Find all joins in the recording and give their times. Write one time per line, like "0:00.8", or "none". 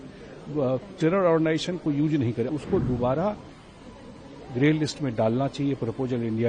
0:02.5